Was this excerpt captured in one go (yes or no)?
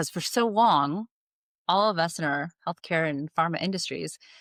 yes